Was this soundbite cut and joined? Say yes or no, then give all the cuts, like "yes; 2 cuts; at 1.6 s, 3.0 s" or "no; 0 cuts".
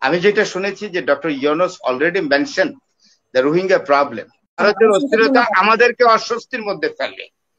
yes; 1 cut; at 4.6 s